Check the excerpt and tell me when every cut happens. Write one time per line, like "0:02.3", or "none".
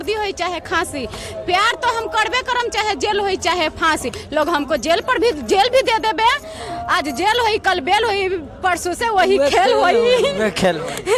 none